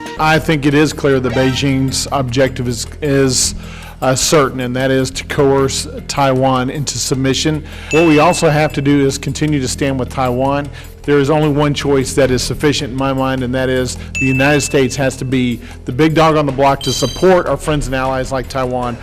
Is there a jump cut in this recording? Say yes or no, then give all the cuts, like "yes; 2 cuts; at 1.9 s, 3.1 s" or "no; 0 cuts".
yes; 2 cuts; at 7.7 s, 10.9 s